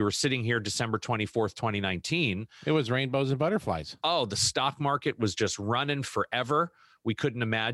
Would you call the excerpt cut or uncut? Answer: uncut